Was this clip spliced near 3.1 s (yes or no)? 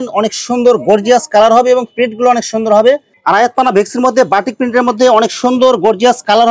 yes